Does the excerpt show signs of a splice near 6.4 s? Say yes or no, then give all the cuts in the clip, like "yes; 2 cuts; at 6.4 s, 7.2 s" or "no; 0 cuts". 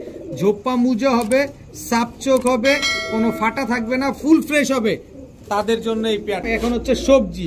yes; 1 cut; at 6.4 s